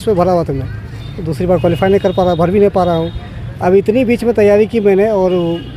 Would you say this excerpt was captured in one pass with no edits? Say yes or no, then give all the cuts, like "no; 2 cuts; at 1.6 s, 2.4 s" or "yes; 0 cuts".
yes; 0 cuts